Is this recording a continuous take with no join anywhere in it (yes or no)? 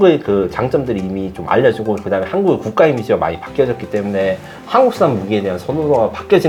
yes